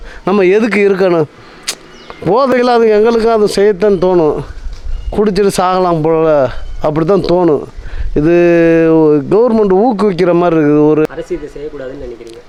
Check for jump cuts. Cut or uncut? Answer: uncut